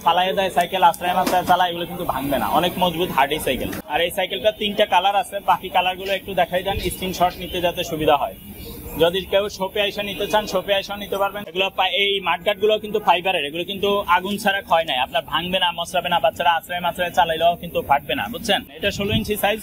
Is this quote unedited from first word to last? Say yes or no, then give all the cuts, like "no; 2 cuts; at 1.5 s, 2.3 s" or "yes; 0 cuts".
no; 3 cuts; at 3.8 s, 11.4 s, 18.7 s